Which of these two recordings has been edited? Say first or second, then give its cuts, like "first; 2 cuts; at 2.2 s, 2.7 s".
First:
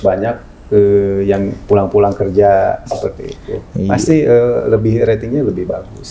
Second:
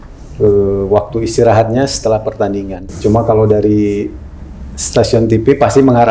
second; 1 cut; at 2.9 s